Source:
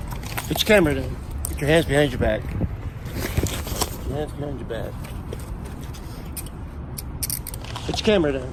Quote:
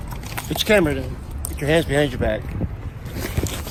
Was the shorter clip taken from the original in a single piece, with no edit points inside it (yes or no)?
yes